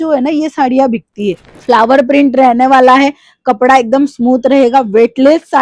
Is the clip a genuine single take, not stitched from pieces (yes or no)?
no